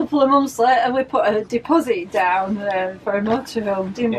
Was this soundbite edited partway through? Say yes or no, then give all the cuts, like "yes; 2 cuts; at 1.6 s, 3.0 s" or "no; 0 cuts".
no; 0 cuts